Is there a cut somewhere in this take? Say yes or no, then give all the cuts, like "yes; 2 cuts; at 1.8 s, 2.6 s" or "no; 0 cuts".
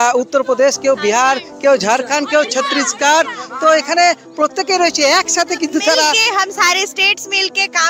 yes; 1 cut; at 6.2 s